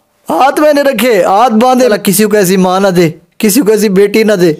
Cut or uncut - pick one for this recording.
cut